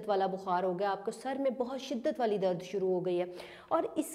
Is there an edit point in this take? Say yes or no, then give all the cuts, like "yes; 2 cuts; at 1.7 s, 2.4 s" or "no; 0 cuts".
no; 0 cuts